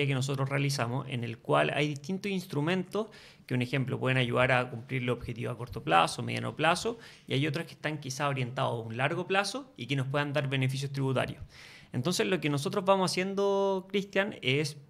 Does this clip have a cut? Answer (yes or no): no